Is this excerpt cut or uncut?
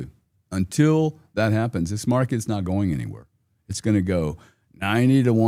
uncut